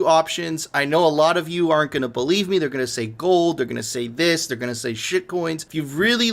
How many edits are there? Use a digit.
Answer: 0